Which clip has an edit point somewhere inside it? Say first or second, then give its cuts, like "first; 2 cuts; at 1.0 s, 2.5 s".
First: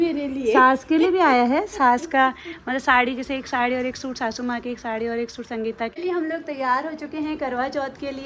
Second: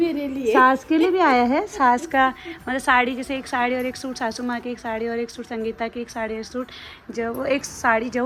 first; 1 cut; at 6.1 s